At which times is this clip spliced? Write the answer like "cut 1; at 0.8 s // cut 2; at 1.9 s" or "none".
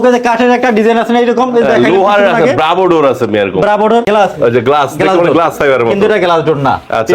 cut 1; at 4.1 s